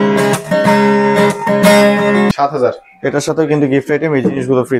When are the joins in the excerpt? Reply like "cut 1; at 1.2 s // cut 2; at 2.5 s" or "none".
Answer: cut 1; at 2.3 s